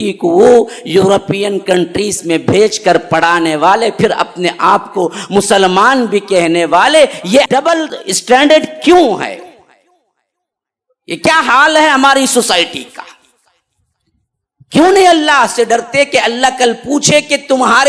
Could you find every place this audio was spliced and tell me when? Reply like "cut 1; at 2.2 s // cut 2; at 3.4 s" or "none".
cut 1; at 7.7 s